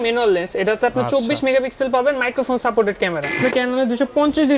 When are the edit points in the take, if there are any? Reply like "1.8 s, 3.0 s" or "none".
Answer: 3.4 s